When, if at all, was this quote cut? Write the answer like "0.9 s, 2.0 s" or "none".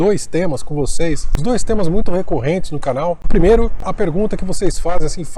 1.3 s, 3.2 s, 3.9 s

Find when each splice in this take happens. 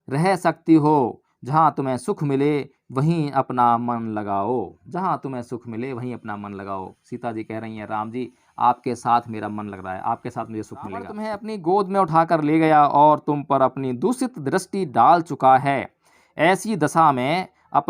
11.2 s

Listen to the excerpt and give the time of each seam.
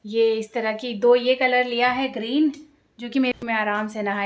3.4 s

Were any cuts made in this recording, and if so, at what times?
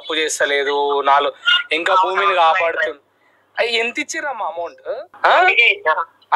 5.1 s

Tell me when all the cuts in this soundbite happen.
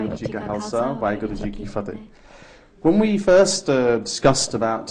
2.3 s

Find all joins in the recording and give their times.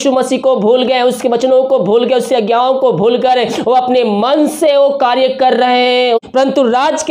6.2 s

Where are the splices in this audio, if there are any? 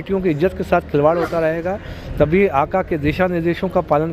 none

